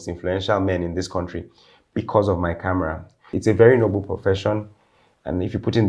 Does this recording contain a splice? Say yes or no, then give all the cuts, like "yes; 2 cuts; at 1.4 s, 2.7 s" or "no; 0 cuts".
yes; 1 cut; at 3.3 s